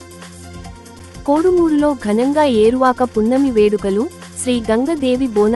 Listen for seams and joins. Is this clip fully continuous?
yes; 0 cuts

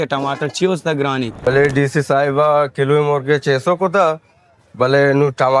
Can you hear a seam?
yes; 1 cut; at 1.4 s

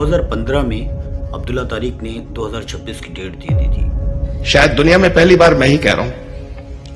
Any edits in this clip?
no; 0 cuts

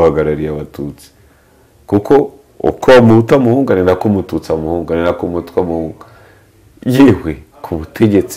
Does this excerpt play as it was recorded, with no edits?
yes; 0 cuts

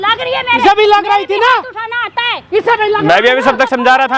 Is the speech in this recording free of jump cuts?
yes; 0 cuts

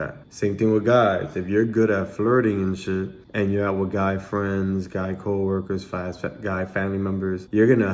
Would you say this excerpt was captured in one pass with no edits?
yes; 0 cuts

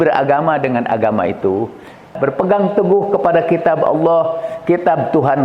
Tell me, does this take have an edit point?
yes; 1 cut; at 2.1 s

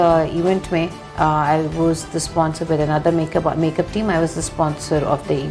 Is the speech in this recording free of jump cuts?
yes; 0 cuts

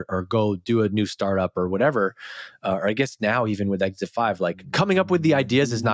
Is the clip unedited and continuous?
no; 1 cut; at 4.6 s

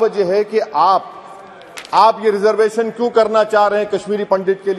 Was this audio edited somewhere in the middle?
no; 0 cuts

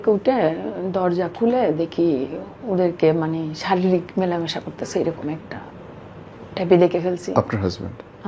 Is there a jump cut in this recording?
no; 0 cuts

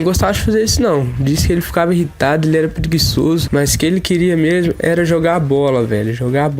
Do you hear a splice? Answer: yes; 1 cut; at 5.2 s

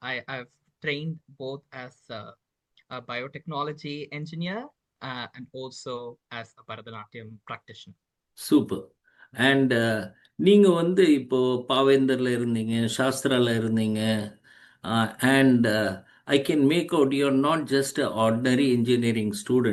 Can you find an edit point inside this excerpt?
no; 0 cuts

